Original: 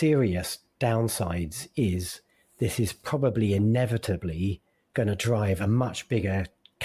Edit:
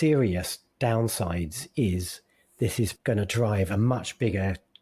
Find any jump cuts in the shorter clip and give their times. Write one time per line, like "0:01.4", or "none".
0:03.0